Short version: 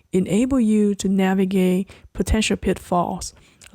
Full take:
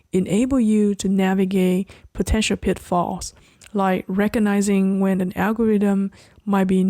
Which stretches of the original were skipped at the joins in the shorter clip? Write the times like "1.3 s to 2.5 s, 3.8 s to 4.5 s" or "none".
none

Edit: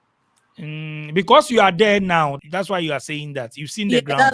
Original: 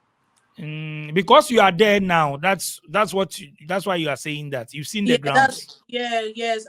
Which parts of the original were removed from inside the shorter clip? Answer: 2.4 s to 3.5 s

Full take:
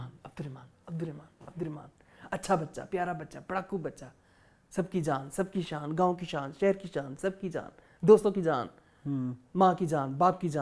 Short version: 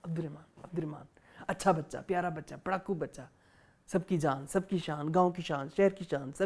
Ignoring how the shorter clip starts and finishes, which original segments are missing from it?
none

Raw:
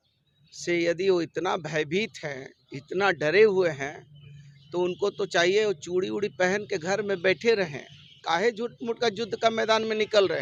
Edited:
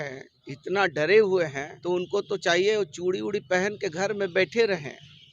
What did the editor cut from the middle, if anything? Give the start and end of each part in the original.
3.9 s to 4.6 s

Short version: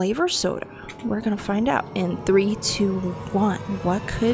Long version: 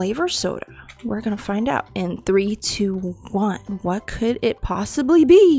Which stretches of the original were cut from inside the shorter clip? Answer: none

